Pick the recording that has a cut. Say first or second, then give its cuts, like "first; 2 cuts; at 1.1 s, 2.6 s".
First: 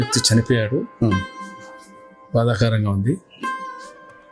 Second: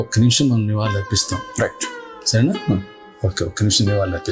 first; 1 cut; at 3.3 s